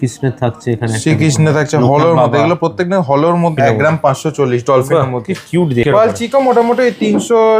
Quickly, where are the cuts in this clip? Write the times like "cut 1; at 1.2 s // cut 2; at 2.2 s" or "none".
cut 1; at 3.5 s // cut 2; at 5.8 s